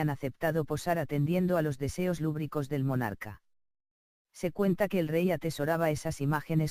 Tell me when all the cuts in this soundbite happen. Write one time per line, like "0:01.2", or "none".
none